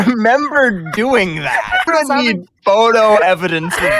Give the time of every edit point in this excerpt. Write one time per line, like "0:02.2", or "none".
0:01.9